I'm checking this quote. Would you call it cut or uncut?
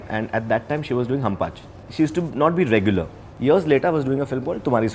cut